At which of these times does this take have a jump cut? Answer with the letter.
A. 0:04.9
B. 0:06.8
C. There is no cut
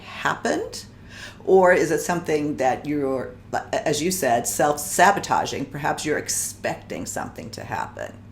A